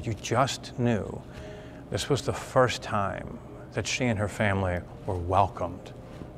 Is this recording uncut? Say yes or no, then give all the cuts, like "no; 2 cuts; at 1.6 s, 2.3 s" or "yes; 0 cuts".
yes; 0 cuts